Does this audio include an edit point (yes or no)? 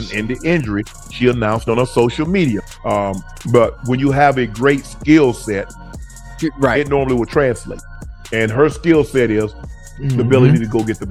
no